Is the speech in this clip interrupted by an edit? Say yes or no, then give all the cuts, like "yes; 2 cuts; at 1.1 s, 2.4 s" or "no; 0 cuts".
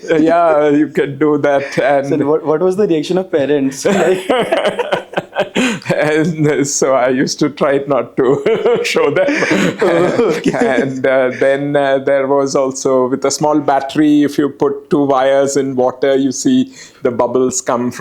no; 0 cuts